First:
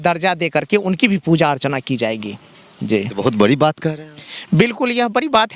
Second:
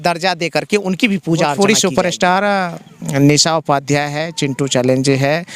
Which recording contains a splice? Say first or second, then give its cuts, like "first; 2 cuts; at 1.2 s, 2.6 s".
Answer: second; 1 cut; at 1.5 s